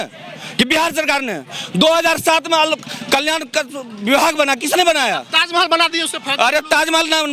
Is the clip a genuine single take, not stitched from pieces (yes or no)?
yes